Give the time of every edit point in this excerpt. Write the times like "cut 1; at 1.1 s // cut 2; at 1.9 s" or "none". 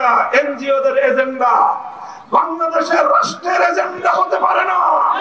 none